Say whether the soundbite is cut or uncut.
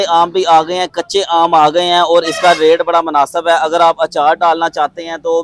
uncut